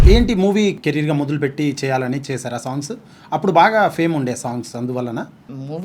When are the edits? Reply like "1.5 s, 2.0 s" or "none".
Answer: none